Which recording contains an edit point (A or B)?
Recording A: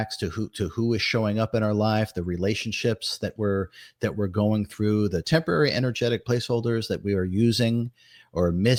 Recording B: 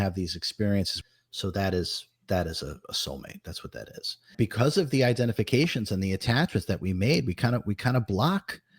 B